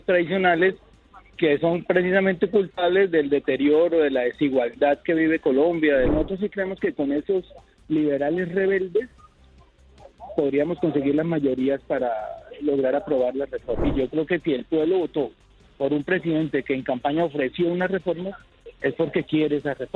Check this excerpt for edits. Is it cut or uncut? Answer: cut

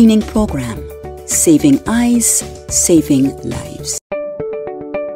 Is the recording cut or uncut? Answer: cut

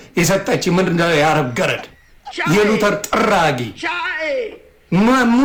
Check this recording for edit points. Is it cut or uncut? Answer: uncut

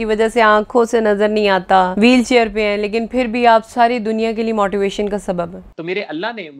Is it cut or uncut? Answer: cut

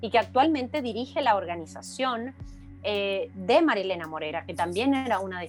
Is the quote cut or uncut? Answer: uncut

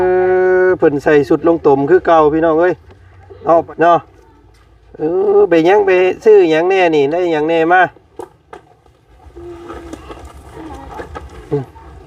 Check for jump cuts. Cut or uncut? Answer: cut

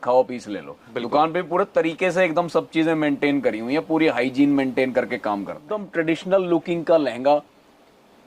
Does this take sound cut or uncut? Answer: cut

